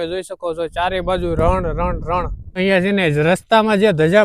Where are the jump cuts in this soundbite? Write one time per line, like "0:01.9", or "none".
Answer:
0:02.6